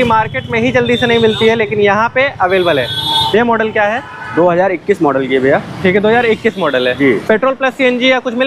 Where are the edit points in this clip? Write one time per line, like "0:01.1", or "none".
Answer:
none

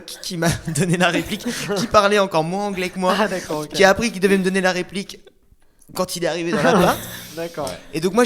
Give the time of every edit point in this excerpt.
none

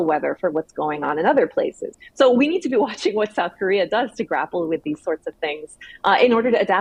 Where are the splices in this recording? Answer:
none

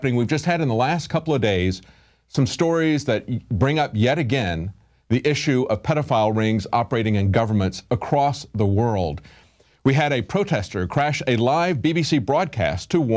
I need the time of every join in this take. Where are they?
0:03.5

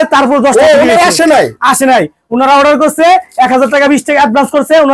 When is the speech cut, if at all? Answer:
none

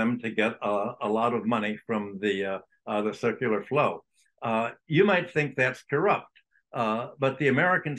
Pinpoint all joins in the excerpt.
none

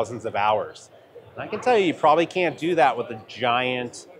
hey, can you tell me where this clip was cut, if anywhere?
none

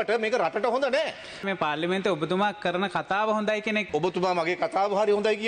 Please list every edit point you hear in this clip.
0:01.4
0:03.9

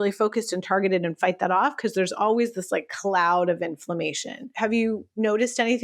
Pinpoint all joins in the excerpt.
0:04.5

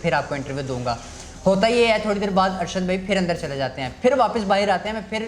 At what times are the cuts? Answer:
none

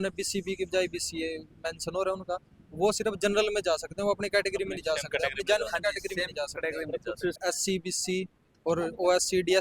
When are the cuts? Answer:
0:07.4

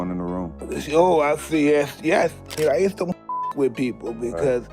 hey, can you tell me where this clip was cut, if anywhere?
0:02.5

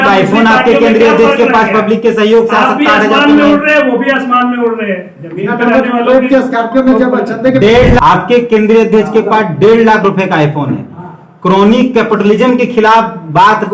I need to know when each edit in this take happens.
0:08.0

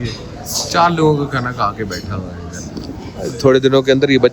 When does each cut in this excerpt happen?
none

